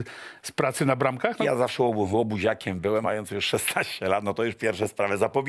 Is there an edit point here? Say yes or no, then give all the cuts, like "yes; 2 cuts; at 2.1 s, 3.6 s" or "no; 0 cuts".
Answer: yes; 2 cuts; at 1.4 s, 3.0 s